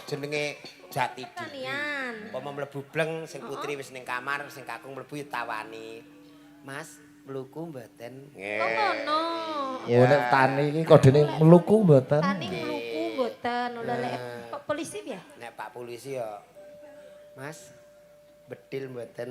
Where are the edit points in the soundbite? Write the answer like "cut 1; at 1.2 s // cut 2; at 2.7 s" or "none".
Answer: cut 1; at 1.4 s